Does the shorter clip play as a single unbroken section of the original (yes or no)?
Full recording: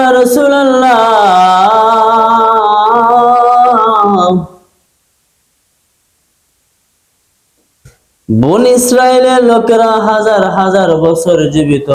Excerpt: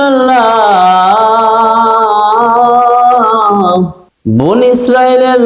no